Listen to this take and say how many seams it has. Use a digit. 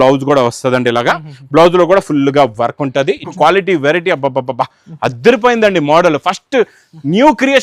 1